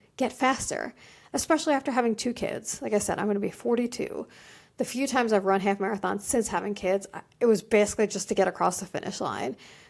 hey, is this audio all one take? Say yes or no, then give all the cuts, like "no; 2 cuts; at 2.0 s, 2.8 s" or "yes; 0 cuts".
yes; 0 cuts